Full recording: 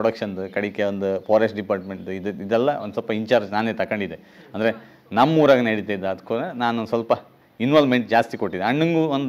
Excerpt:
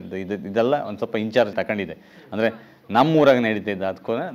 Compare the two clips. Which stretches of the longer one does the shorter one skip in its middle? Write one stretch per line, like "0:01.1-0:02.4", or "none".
0:03.5-0:03.7

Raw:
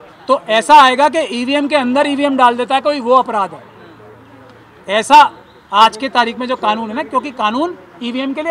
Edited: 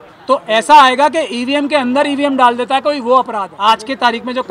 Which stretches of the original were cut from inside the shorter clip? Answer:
0:03.5-0:05.6

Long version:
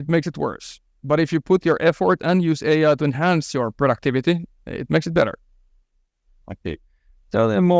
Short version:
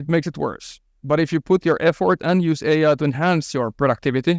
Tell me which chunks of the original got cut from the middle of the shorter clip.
none

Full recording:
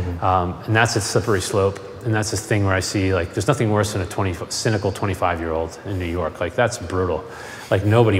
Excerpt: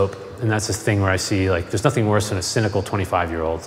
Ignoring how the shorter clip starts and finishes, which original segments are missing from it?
0:04.0-0:04.5

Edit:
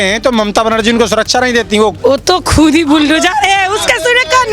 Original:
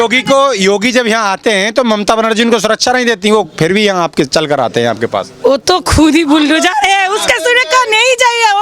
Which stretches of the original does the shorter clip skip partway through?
0:03.5-0:05.4

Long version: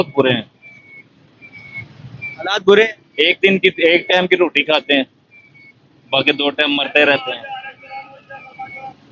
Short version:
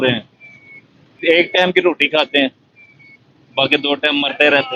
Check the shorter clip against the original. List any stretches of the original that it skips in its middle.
0:01.4-0:03.8

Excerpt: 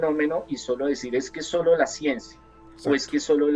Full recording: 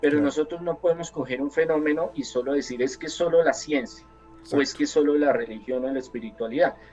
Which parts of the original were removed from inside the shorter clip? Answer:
none

